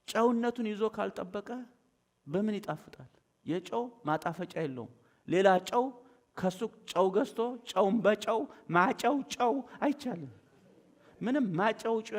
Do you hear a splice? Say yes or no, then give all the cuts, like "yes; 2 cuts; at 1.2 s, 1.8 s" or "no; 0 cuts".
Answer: no; 0 cuts